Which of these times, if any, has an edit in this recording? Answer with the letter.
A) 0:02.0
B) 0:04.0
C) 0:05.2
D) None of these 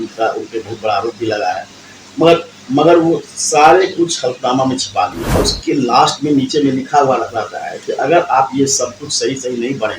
C